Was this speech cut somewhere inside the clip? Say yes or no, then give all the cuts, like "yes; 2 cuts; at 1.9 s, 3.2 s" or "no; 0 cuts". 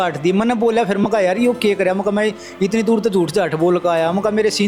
no; 0 cuts